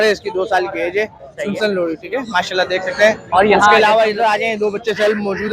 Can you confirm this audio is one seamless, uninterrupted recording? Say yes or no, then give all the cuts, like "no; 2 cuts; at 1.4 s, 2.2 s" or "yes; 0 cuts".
no; 1 cut; at 3.3 s